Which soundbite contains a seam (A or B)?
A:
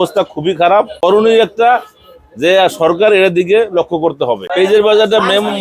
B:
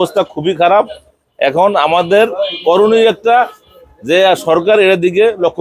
A